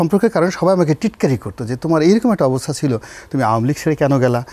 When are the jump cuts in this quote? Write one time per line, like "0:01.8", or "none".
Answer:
none